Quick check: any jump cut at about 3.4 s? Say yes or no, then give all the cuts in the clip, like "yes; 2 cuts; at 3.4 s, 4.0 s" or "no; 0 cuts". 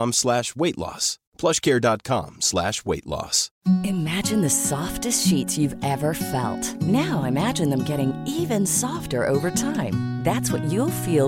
yes; 1 cut; at 3.4 s